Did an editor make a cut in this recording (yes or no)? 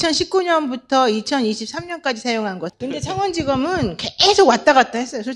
yes